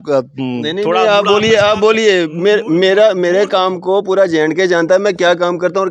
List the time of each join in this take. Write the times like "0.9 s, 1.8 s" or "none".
none